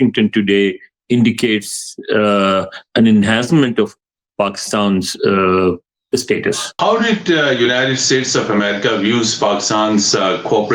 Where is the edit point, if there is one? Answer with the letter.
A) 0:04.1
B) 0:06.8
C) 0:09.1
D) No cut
B